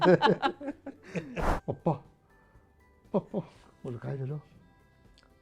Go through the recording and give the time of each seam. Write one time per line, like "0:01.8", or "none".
0:01.4